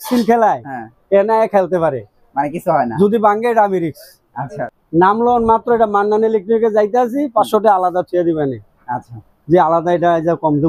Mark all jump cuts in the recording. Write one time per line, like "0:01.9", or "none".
0:04.8